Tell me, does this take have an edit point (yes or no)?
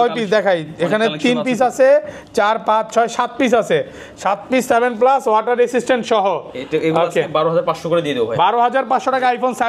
no